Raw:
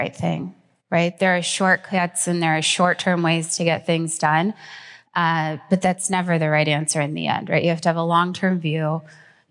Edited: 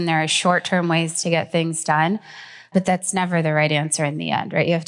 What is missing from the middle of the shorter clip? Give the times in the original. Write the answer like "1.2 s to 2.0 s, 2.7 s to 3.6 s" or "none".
5.0 s to 5.6 s